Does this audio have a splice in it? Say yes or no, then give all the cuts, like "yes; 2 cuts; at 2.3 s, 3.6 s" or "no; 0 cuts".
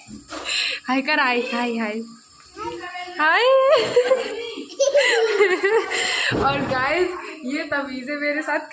no; 0 cuts